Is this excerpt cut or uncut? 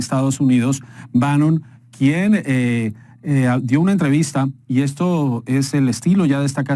cut